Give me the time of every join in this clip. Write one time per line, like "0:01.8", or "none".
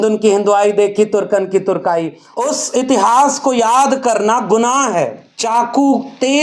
0:02.2
0:05.3

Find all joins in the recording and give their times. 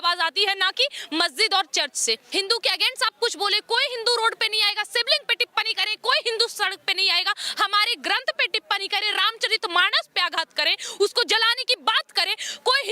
0:02.2

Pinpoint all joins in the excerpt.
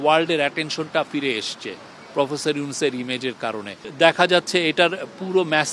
none

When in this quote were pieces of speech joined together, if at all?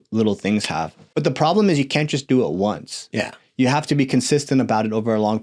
0:01.0

